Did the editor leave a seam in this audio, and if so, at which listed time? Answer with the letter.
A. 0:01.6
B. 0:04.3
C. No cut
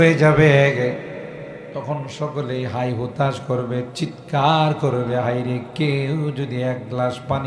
A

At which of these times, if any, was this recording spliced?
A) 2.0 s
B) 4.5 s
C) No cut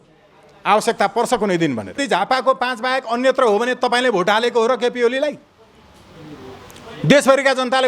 A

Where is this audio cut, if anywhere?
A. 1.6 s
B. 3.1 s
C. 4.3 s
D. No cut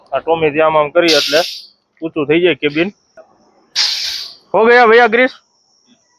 B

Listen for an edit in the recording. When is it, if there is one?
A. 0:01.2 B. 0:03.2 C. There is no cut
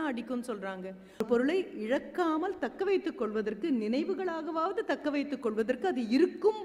A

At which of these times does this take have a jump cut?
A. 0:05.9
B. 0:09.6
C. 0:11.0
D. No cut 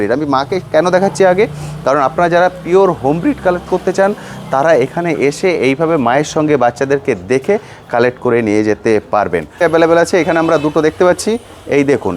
B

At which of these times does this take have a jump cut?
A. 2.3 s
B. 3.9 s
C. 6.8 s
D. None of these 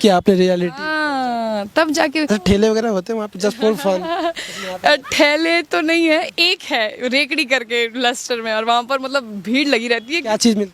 A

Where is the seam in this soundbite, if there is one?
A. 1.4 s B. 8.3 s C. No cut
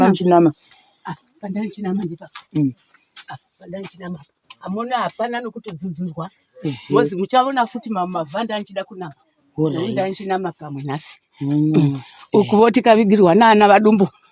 C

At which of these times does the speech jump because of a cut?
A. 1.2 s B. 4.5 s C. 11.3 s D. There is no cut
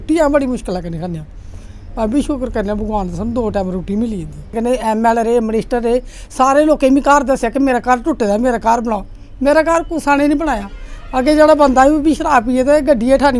B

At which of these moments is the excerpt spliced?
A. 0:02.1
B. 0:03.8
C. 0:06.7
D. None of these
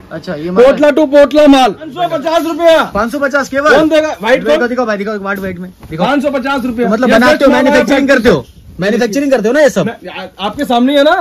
A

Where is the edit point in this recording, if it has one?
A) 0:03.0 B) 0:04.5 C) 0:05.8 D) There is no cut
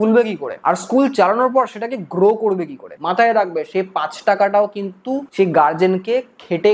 A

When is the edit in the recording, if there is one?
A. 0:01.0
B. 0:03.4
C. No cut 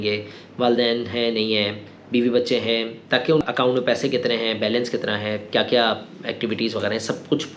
B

